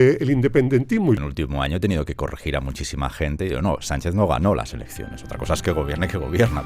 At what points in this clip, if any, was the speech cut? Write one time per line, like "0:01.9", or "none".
0:01.2